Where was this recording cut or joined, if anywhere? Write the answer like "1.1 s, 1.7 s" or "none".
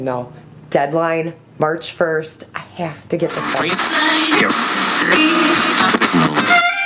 none